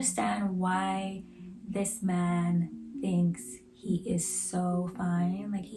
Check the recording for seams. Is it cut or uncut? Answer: uncut